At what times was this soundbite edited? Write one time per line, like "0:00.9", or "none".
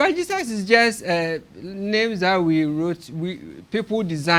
none